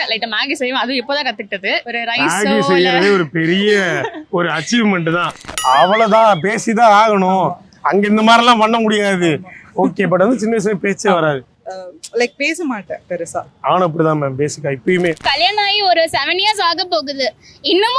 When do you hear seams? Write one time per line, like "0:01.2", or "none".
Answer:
0:01.8
0:05.5
0:15.2